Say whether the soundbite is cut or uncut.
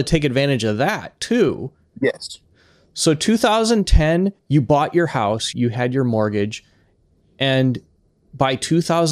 cut